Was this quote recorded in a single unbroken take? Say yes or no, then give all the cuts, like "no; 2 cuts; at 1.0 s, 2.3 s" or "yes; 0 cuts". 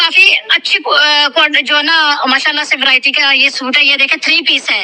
yes; 0 cuts